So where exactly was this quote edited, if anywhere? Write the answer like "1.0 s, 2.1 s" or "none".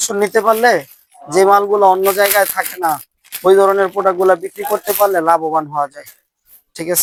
none